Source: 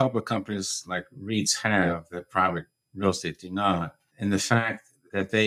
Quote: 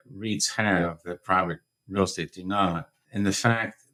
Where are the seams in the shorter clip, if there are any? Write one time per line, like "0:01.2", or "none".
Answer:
none